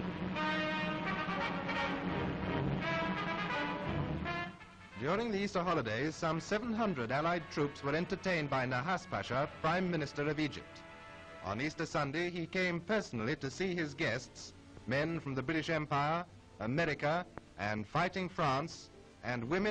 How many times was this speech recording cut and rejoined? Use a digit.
1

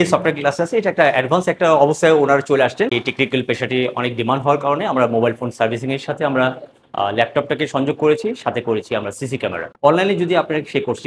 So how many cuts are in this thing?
2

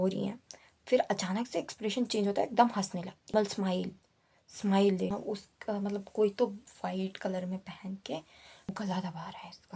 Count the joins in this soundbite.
3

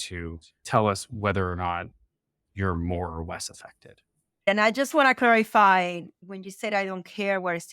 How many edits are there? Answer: 1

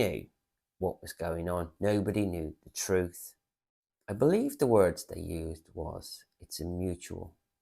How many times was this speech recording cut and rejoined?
1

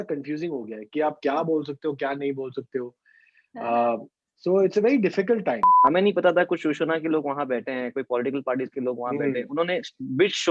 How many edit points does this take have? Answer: 1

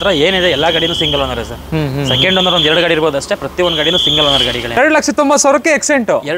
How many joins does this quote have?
1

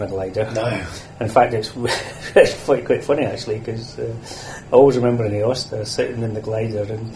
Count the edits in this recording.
0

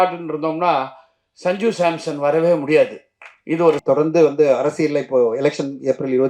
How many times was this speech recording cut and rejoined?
1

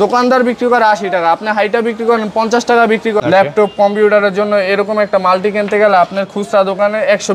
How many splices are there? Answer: 1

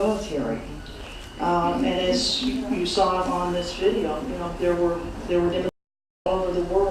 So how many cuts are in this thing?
1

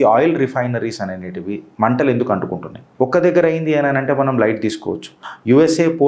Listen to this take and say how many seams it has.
2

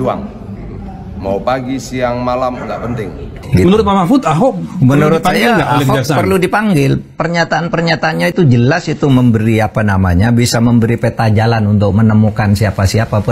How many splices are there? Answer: 2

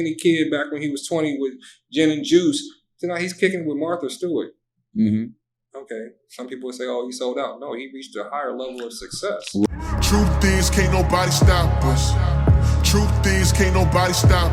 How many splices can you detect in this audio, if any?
1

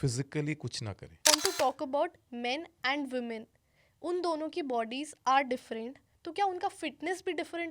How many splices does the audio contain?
1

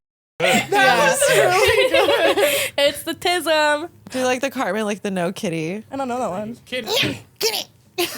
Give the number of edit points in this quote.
3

